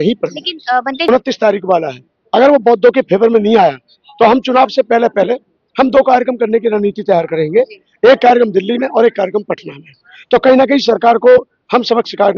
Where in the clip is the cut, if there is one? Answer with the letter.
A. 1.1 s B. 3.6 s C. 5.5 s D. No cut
A